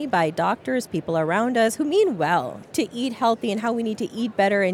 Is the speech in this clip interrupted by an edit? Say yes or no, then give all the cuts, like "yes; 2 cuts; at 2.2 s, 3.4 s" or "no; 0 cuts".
yes; 1 cut; at 2.6 s